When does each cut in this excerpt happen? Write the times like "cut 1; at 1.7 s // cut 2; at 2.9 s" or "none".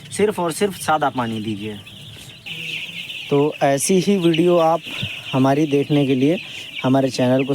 cut 1; at 2.3 s